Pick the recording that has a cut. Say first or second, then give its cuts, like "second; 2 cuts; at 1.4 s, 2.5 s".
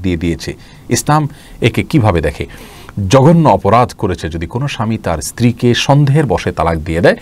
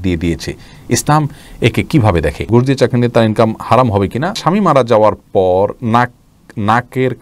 second; 2 cuts; at 2.4 s, 4.4 s